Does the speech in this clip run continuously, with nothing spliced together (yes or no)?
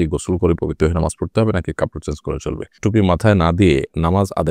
no